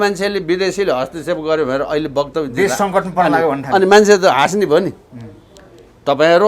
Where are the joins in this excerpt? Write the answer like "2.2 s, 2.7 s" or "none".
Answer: none

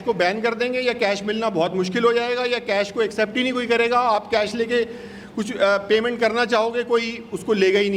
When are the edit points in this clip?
none

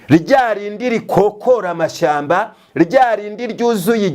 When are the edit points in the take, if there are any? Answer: none

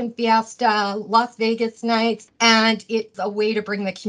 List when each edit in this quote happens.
2.3 s, 3.1 s

